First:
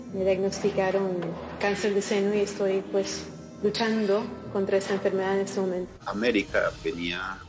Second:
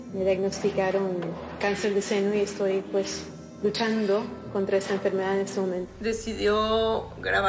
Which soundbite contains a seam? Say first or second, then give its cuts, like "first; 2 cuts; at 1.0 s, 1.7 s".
first; 1 cut; at 6.0 s